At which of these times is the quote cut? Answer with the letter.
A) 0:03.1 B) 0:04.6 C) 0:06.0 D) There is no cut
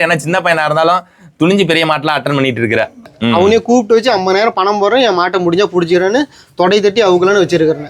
A